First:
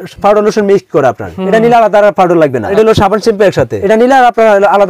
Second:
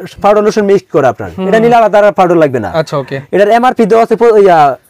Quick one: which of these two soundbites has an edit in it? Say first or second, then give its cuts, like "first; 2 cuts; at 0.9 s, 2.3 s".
first; 2 cuts; at 2.7 s, 3.8 s